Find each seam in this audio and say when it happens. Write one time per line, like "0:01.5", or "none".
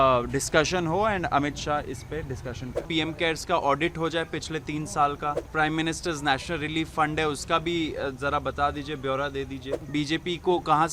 0:02.9
0:05.5
0:09.7